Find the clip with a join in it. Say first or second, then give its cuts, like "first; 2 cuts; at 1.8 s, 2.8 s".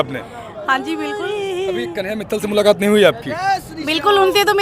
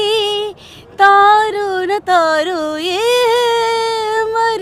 first; 2 cuts; at 1.1 s, 2.1 s